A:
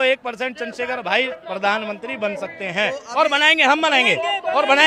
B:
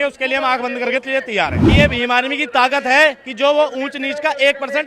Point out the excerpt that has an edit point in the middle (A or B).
B